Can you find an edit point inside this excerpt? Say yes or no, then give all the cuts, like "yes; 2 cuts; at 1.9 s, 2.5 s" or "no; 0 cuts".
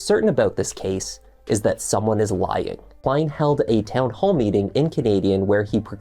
yes; 1 cut; at 2.8 s